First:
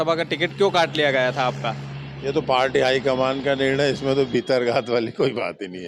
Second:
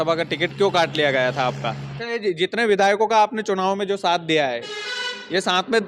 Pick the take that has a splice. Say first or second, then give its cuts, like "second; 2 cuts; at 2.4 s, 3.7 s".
second; 1 cut; at 1.9 s